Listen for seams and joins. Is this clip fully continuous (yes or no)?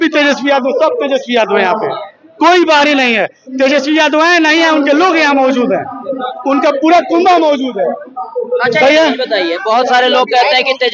yes